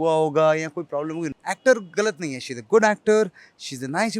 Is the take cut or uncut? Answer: cut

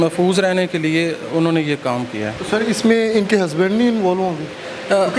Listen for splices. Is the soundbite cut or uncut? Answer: uncut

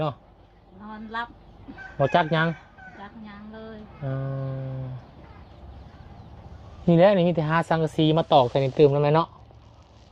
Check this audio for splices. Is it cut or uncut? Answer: uncut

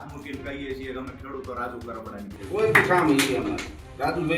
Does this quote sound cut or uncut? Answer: cut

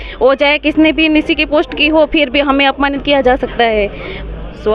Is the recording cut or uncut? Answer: uncut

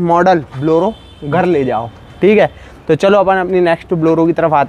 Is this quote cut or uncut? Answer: uncut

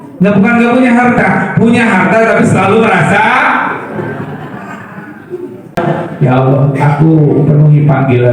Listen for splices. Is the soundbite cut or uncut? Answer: cut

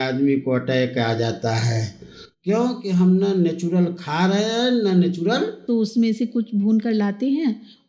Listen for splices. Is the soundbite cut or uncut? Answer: cut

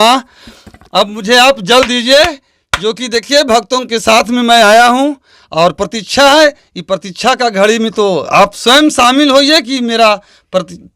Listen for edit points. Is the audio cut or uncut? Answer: uncut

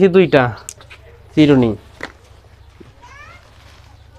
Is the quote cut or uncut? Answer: uncut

